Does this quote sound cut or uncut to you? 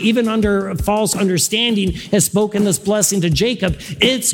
uncut